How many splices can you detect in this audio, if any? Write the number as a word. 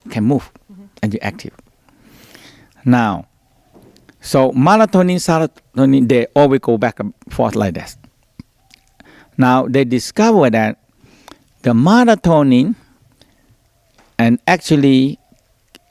one